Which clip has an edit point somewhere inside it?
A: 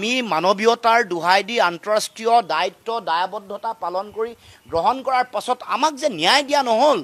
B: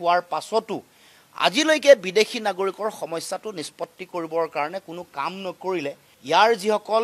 B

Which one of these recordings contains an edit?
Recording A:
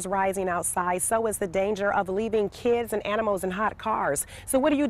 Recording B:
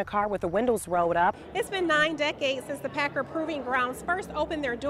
B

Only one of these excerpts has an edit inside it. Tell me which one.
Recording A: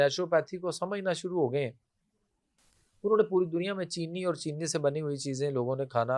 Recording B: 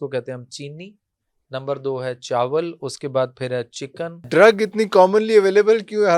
B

